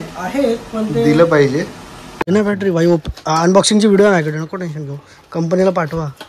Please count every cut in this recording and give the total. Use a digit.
1